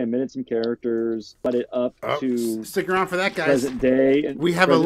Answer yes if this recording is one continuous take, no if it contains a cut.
no